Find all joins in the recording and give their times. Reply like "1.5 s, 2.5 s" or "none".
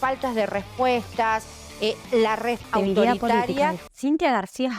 2.6 s, 3.9 s